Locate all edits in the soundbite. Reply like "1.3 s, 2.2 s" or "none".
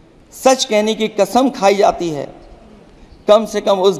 none